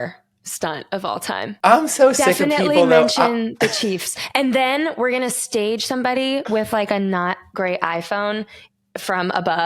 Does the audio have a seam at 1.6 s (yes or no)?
yes